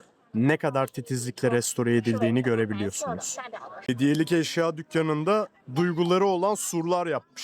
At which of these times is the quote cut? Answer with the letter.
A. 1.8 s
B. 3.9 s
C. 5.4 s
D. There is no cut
B